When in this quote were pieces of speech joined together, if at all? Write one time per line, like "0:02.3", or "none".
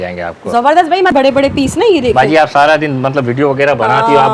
0:01.1